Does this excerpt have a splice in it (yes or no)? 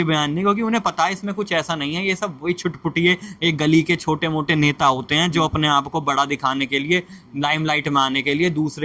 no